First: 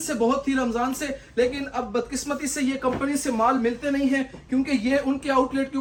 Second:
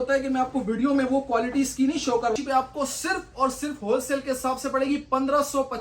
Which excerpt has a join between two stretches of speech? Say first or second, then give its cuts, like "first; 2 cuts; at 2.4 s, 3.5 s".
second; 1 cut; at 2.3 s